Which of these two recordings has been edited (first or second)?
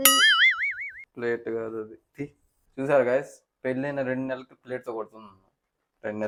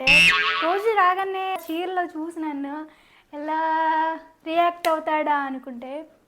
second